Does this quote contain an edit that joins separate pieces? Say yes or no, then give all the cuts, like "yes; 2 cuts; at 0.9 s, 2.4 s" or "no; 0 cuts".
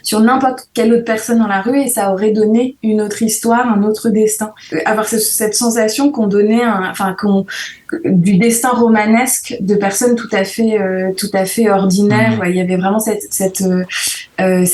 yes; 2 cuts; at 4.6 s, 12.4 s